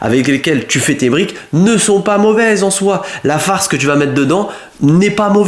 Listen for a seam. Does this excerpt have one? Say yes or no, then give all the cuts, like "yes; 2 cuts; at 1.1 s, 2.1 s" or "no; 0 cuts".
no; 0 cuts